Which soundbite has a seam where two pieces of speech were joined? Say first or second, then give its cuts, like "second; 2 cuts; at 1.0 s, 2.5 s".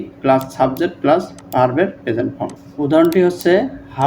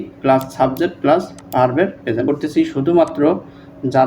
second; 1 cut; at 2.3 s